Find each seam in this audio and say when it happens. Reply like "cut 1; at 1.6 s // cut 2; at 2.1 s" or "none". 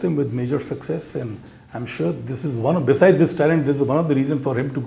none